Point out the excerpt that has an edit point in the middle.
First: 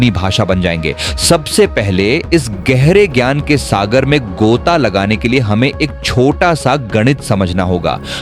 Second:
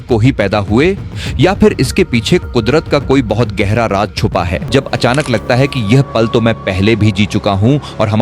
second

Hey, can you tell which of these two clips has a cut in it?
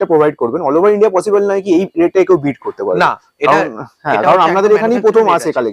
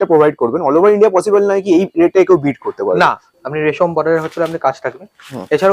second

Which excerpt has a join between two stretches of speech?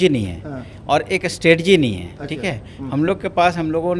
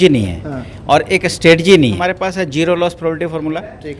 second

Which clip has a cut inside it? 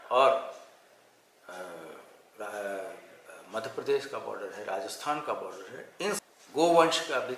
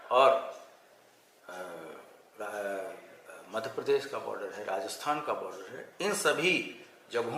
first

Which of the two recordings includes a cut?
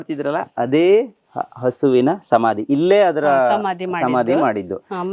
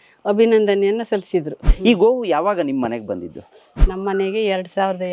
second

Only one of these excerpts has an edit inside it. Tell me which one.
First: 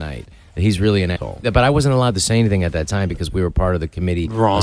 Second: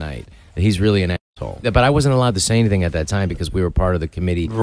first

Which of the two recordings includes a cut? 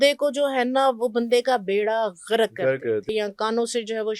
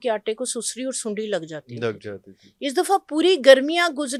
first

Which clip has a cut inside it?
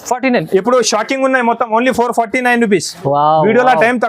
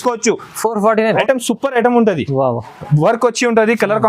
second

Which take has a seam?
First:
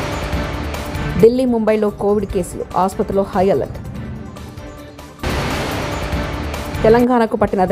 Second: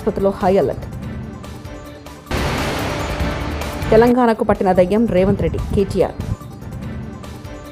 first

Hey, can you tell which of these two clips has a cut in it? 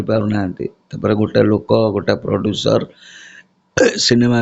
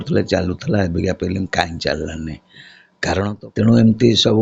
second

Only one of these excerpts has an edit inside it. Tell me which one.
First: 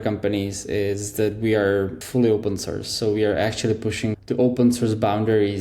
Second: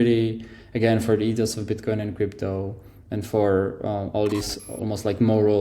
first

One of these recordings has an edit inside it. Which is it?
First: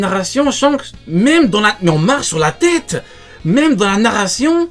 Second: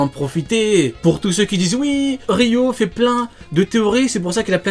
second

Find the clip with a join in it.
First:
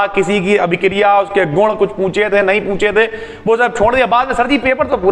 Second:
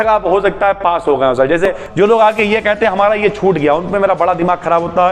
second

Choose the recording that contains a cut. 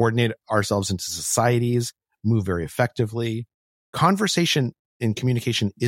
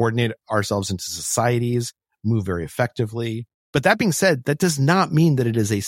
second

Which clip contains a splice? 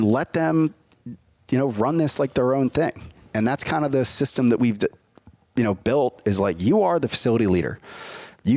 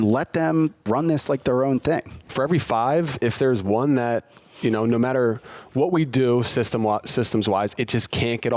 second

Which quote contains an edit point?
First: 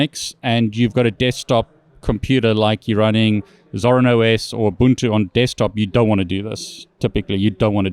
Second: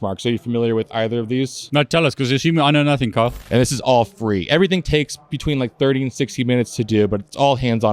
second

